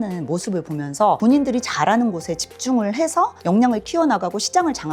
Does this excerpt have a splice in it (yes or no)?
no